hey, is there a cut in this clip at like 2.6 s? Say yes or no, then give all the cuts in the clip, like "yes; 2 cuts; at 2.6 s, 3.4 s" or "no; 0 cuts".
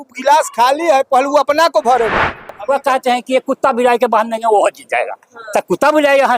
yes; 1 cut; at 2.6 s